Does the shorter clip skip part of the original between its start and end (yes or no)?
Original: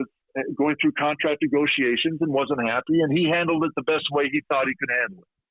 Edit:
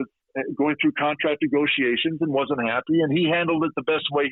no